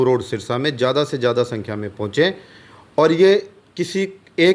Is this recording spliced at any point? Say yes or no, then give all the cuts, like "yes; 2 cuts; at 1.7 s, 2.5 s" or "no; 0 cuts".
no; 0 cuts